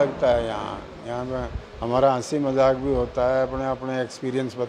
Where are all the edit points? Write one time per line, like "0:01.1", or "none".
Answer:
none